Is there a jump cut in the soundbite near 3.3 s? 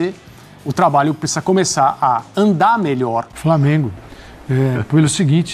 yes; 1 cut; at 3.3 s

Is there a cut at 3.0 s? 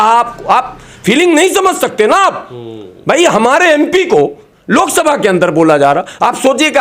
no; 0 cuts

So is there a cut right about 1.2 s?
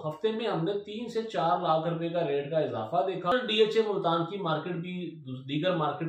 no; 1 cut; at 3.3 s

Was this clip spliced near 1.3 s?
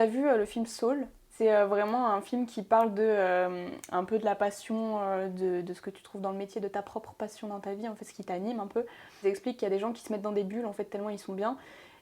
yes; 2 cuts; at 1.3 s, 9.2 s

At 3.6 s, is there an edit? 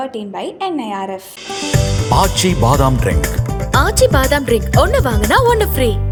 no; 0 cuts

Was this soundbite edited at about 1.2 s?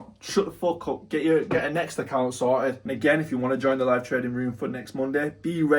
no; 1 cut; at 2.9 s

